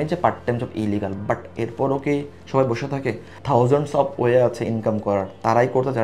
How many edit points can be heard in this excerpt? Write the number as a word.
one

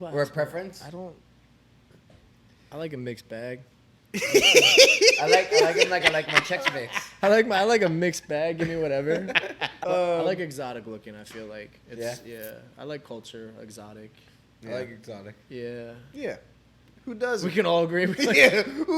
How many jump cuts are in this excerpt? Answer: one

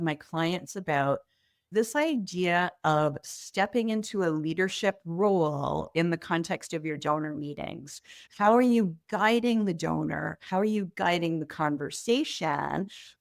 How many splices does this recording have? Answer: one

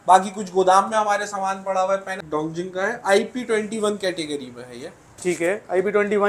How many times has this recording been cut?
one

